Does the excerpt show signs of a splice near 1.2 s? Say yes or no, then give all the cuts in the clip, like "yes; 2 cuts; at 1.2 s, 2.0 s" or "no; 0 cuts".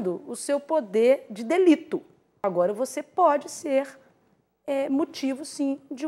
no; 1 cut; at 2.4 s